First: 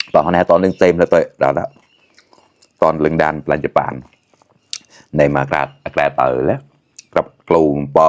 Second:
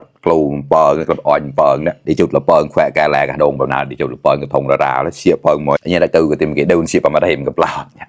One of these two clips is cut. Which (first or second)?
second